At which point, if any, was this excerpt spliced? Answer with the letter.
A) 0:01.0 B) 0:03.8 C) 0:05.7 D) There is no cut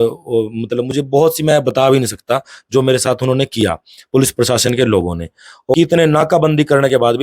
C